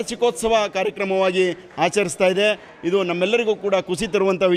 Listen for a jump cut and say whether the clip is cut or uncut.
uncut